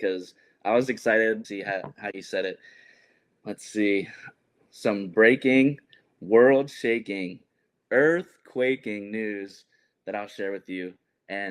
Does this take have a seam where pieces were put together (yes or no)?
yes